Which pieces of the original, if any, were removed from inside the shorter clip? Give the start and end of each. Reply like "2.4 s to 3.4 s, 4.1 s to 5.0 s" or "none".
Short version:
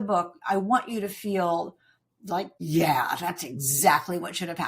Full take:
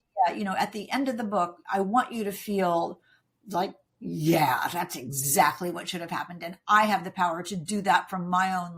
3.8 s to 4.1 s

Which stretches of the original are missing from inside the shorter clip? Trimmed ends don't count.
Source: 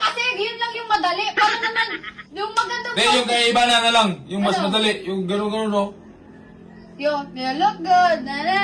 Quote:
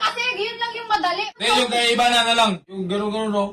1.3 s to 2.9 s, 4.2 s to 5.1 s

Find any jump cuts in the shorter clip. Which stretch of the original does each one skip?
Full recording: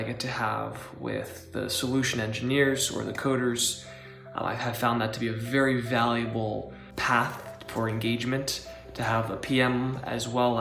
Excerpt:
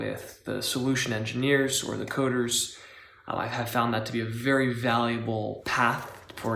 6.7 s to 6.9 s

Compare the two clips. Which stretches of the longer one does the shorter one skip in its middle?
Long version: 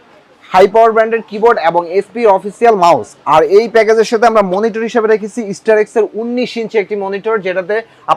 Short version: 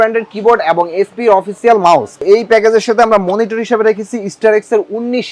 3.2 s to 3.5 s

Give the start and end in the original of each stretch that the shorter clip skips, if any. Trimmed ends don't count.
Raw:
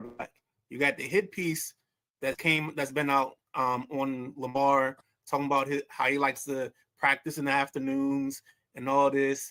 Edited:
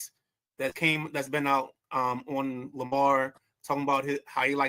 none

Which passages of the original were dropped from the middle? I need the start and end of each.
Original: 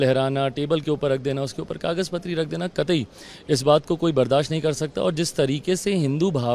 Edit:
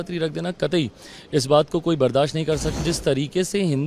5.0 s to 5.1 s

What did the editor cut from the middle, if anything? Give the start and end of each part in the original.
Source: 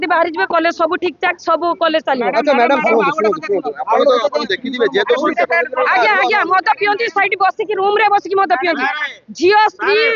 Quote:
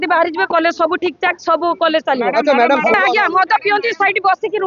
2.9 s to 6.1 s

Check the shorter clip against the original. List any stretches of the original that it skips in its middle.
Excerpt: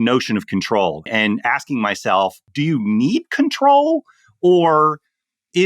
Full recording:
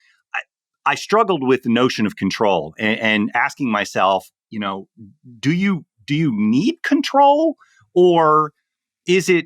2.8 s to 3.0 s, 4.3 s to 6.0 s

